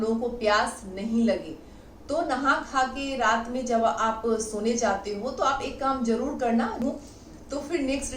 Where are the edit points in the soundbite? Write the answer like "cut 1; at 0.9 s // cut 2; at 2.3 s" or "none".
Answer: cut 1; at 6.8 s